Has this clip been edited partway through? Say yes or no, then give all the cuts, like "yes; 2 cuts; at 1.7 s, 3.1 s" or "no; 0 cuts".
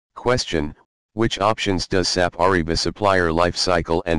yes; 1 cut; at 1.3 s